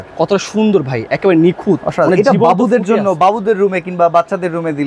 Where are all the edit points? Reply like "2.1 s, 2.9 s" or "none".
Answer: none